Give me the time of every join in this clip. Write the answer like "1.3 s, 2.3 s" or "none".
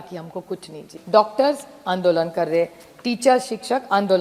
0.9 s